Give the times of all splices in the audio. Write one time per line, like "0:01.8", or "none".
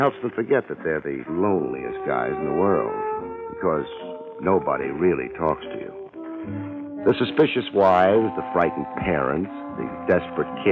none